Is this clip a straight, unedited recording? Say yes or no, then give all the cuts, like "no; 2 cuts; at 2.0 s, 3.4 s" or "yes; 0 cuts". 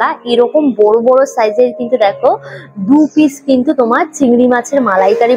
yes; 0 cuts